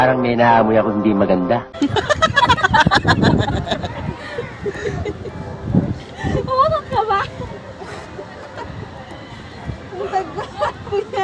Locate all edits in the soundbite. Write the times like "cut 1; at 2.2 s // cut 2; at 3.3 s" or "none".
cut 1; at 1.7 s